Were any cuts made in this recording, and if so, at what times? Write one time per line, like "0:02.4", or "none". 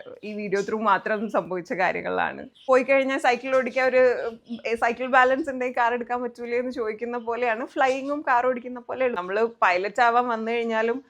0:02.5
0:09.2